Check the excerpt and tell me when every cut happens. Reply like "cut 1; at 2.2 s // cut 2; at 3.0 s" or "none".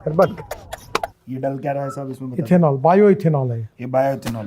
cut 1; at 1.2 s

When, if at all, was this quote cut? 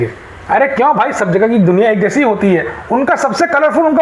none

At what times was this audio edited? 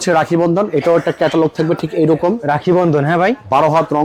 none

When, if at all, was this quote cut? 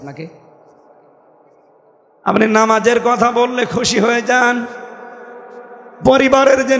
cut 1; at 2.1 s

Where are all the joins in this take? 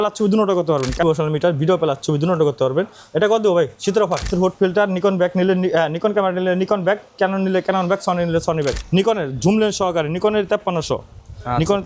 cut 1; at 1.0 s // cut 2; at 4.3 s // cut 3; at 8.8 s

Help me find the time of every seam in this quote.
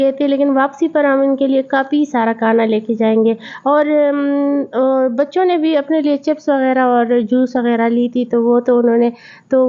none

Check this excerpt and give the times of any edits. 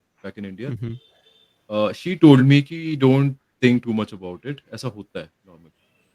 none

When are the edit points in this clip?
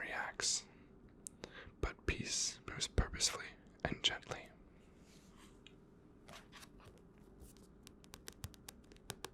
none

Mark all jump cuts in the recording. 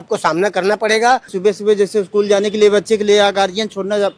cut 1; at 1.3 s

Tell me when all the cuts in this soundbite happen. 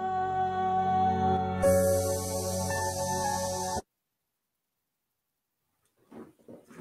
cut 1; at 3.8 s

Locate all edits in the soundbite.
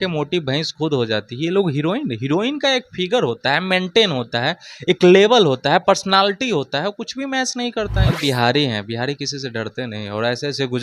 cut 1; at 8.2 s

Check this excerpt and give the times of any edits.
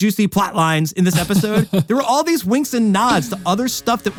none

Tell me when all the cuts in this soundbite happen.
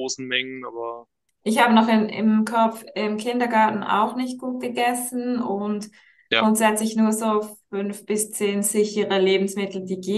none

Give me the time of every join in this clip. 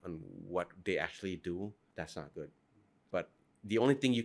cut 1; at 1.8 s // cut 2; at 3.0 s

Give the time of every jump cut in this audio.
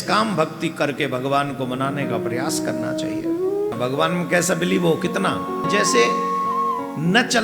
cut 1; at 3.8 s // cut 2; at 5.6 s

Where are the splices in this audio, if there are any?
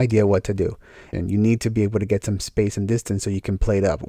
cut 1; at 1.1 s

